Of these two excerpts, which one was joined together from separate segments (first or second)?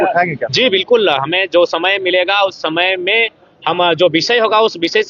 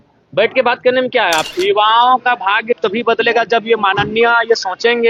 second